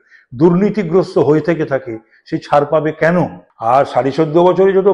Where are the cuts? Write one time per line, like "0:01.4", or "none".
0:03.5